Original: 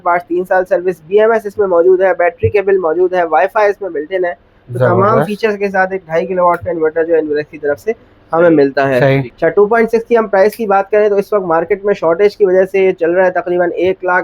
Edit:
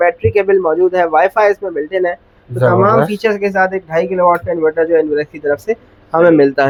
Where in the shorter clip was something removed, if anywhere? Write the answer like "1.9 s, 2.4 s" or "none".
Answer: none